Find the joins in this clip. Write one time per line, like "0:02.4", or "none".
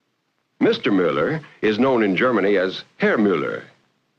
0:03.1

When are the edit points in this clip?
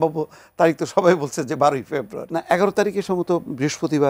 0:02.2

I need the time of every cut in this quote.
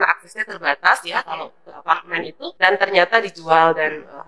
0:02.4

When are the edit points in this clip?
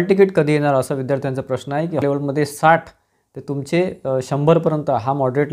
0:02.0

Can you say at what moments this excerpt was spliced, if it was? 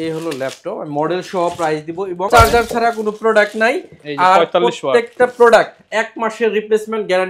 0:02.3

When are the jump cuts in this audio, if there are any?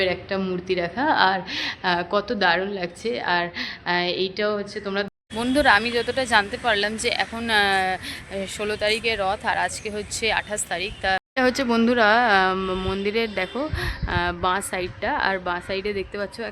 0:05.1
0:11.3

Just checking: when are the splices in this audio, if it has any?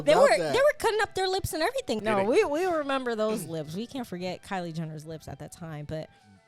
0:02.0

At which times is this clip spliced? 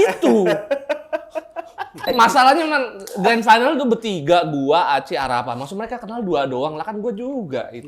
0:02.0

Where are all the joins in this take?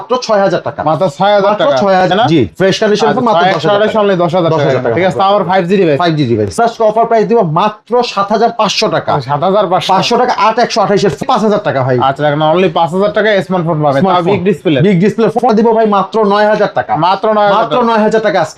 0:02.0
0:06.6
0:11.2
0:15.4

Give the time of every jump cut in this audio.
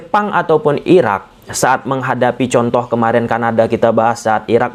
none

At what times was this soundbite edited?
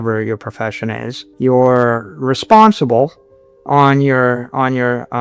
0:01.2

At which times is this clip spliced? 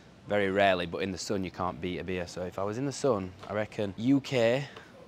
0:03.9

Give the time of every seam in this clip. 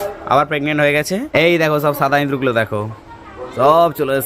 0:01.3

